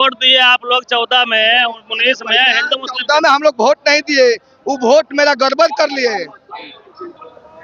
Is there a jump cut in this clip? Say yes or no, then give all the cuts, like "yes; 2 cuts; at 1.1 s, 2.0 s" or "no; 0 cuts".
no; 0 cuts